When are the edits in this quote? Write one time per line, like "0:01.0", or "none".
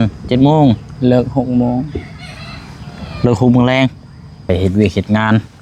0:04.4